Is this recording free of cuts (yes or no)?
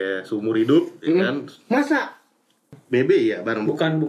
no